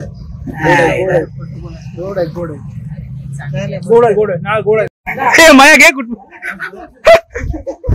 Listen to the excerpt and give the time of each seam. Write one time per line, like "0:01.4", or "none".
0:05.0